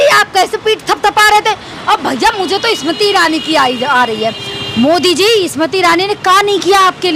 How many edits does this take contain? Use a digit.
0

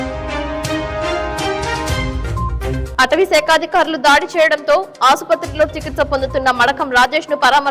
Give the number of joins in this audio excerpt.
1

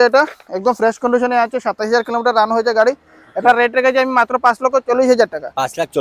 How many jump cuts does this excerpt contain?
0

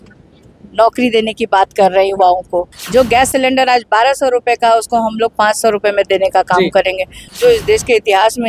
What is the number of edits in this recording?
2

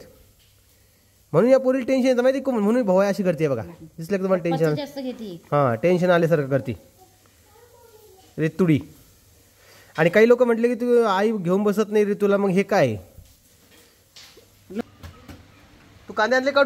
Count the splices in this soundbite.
1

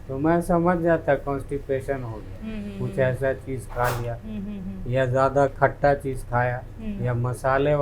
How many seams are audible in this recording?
0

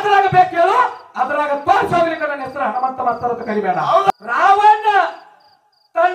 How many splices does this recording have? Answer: 1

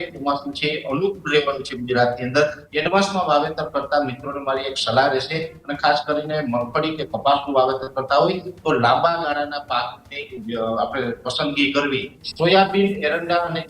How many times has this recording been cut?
3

